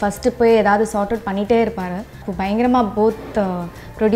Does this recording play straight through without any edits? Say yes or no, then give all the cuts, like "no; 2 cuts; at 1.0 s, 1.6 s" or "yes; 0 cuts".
no; 1 cut; at 2.3 s